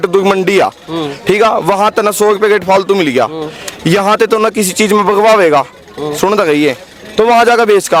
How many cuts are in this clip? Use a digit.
0